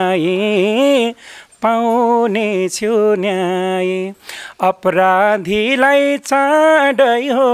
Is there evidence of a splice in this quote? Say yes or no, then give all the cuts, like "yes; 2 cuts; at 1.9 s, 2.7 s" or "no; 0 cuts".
no; 0 cuts